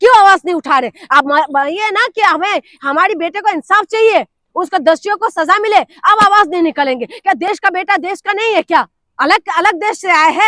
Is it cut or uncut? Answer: uncut